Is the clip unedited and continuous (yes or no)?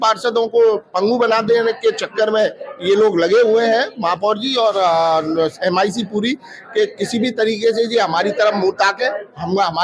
yes